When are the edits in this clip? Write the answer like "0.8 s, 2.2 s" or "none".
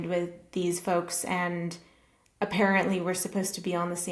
none